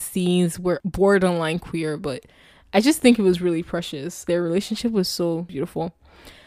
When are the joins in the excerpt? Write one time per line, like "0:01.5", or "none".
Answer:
0:00.9
0:04.2
0:05.5